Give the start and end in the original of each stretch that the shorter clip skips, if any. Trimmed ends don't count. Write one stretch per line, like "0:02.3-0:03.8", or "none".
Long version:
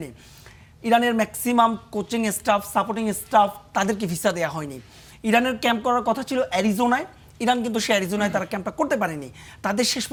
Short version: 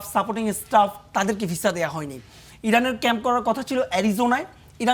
none